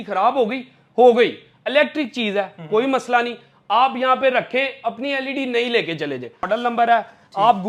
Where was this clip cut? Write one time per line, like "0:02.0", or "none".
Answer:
0:06.5